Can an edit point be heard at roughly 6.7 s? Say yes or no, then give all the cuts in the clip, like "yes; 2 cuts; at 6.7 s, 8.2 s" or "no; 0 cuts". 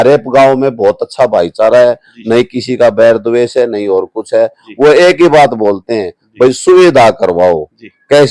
no; 0 cuts